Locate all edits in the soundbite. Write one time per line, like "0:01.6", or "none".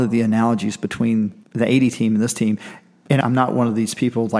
0:01.4
0:03.2